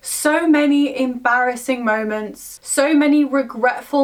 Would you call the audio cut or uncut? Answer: uncut